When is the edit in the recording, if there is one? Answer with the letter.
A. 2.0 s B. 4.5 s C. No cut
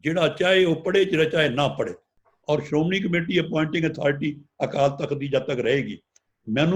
A